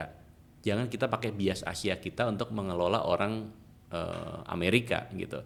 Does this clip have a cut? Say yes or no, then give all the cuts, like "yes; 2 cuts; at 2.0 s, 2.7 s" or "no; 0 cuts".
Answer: no; 0 cuts